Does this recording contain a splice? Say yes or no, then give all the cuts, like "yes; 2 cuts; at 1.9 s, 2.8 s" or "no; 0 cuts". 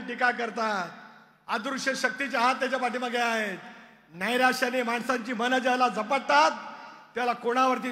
no; 0 cuts